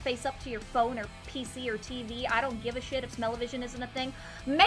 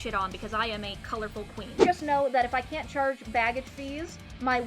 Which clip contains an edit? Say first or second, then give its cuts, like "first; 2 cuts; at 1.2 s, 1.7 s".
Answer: second; 1 cut; at 1.7 s